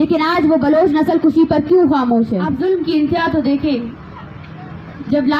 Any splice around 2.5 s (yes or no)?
yes